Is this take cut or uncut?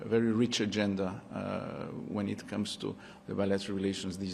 uncut